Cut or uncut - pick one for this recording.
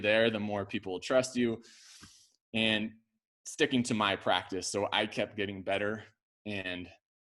uncut